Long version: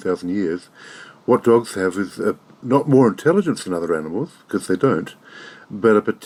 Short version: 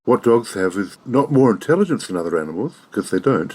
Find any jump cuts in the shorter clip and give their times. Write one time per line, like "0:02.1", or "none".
0:00.9